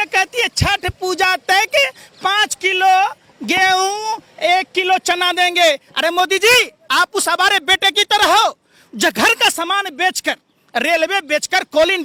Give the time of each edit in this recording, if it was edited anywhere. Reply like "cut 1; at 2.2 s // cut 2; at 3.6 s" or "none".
none